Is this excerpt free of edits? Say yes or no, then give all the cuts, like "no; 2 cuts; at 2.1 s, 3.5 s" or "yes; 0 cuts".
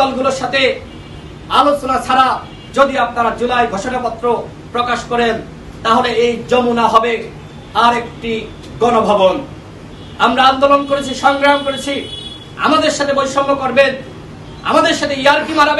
yes; 0 cuts